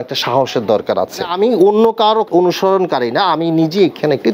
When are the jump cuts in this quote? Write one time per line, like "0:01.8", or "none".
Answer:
0:01.3
0:02.3

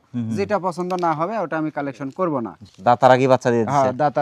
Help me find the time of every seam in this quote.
0:02.6

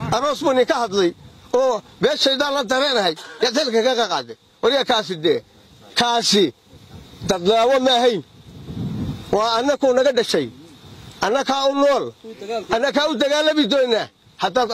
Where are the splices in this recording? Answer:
none

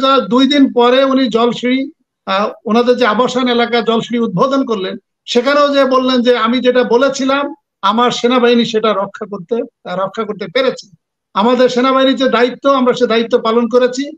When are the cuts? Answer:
none

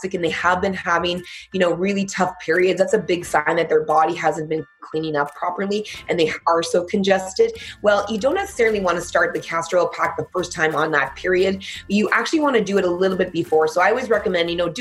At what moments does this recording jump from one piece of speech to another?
none

